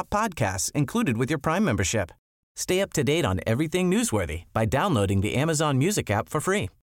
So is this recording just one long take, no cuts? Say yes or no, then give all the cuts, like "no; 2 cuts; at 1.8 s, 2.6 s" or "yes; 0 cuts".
yes; 0 cuts